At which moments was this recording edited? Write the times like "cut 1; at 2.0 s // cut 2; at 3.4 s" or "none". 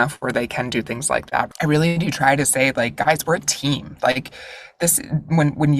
cut 1; at 1.5 s